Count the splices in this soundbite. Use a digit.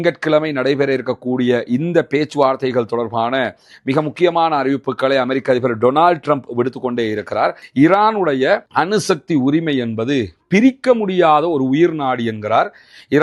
1